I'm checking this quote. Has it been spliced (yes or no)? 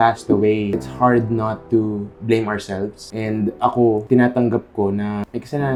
no